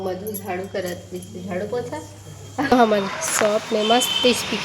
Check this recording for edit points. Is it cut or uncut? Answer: cut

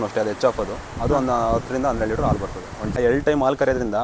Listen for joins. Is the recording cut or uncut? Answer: cut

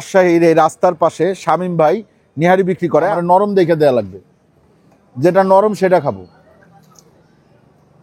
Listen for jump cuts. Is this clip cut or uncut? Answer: cut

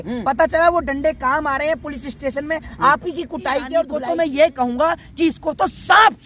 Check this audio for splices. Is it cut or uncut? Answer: cut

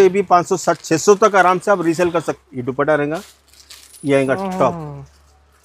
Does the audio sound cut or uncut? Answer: cut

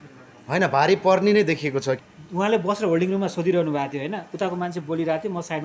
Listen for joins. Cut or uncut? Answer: cut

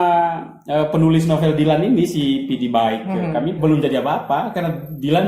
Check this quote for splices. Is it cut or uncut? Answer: cut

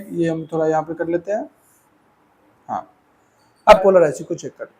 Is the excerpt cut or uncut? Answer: cut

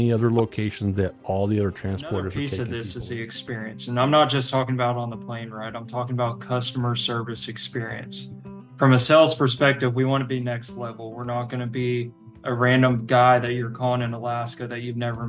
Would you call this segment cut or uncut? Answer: cut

